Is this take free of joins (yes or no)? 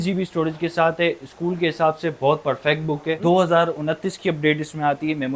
yes